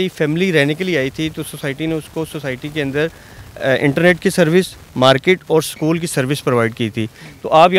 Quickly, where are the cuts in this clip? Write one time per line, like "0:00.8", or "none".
none